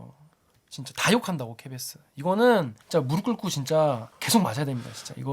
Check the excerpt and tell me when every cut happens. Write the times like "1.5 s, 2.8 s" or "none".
2.8 s, 4.1 s